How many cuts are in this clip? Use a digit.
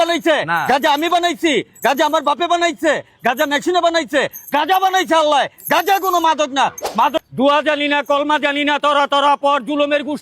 1